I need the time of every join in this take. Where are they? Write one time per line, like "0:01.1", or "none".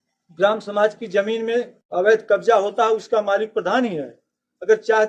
none